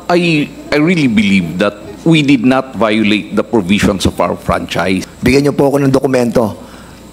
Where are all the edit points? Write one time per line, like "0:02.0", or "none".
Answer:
0:05.1